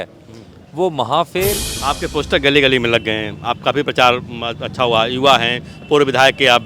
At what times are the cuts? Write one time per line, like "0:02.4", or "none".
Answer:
0:01.8